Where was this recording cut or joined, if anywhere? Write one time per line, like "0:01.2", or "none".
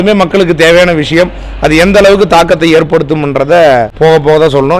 0:03.9